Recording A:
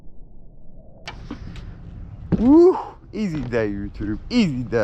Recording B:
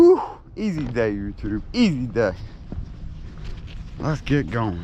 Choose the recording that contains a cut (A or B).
A